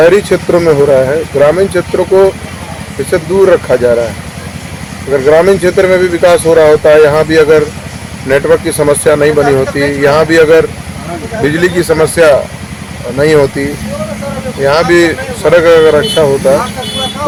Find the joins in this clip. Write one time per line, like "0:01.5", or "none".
none